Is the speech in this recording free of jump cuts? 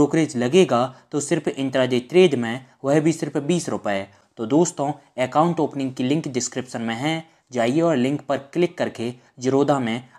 no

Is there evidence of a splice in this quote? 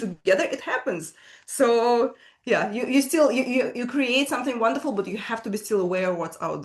no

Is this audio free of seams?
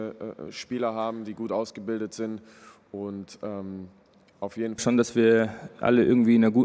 no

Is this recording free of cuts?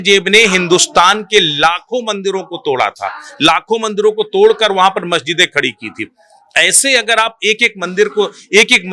yes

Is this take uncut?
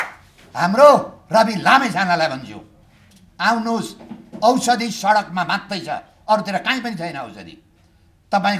yes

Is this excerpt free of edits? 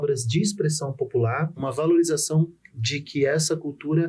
no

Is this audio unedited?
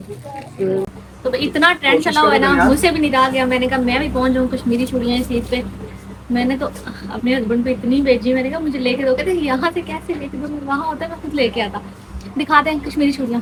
yes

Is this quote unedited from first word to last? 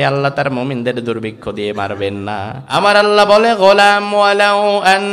no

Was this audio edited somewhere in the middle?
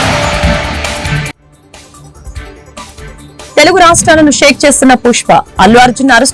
no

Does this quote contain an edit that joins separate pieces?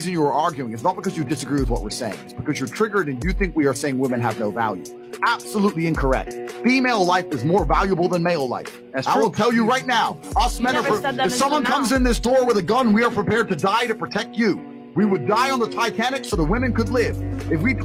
no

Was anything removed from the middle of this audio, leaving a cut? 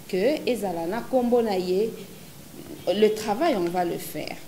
no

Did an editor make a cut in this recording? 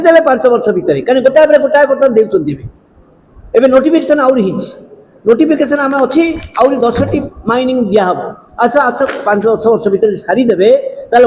no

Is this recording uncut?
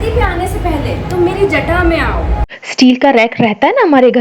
no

